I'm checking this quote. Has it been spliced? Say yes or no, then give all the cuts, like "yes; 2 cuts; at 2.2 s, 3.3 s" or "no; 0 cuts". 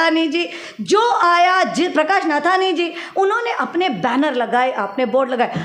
no; 0 cuts